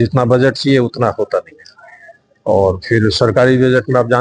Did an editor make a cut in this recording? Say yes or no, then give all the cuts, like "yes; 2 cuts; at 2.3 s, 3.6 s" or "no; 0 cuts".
no; 0 cuts